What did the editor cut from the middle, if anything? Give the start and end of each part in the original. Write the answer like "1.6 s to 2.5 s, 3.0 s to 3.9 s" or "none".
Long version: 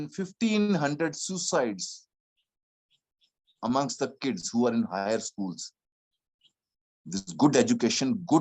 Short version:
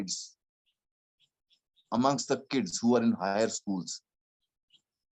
none